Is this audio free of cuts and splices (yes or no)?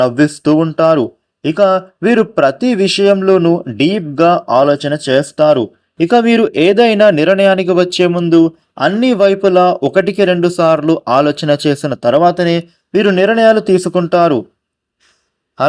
yes